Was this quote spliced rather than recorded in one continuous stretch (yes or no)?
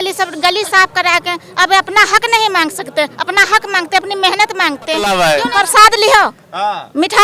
yes